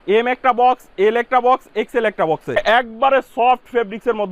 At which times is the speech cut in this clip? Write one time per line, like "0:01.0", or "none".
0:02.6